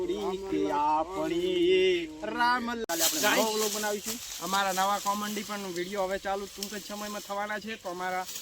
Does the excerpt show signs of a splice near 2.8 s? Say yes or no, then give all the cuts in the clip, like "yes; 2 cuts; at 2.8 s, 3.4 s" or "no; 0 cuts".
yes; 1 cut; at 2.8 s